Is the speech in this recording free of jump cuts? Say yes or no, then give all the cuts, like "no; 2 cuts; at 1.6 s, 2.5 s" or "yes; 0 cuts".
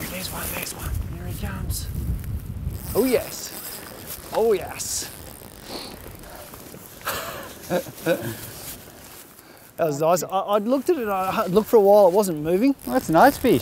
no; 2 cuts; at 0.9 s, 2.8 s